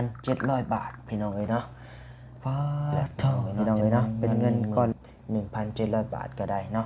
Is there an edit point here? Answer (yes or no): yes